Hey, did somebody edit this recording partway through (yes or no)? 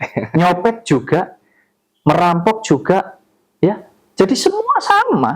yes